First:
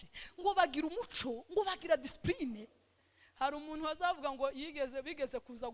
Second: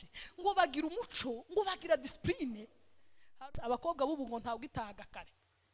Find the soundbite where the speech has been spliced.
second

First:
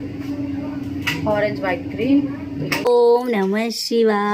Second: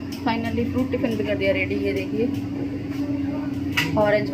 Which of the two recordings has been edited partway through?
first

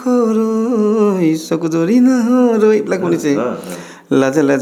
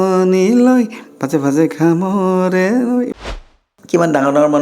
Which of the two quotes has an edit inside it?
second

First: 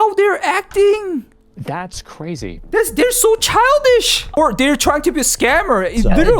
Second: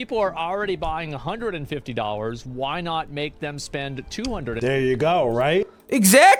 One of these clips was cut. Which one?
first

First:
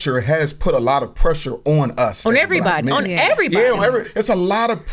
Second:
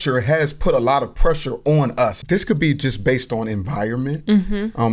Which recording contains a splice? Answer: second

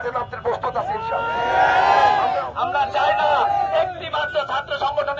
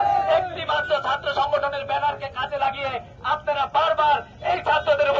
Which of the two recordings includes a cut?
first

